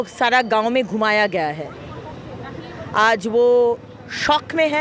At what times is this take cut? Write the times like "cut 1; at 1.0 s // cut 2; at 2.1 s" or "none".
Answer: none